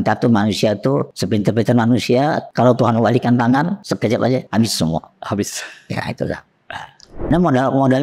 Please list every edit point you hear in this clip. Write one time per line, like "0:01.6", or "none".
0:01.1
0:02.4
0:04.3
0:07.3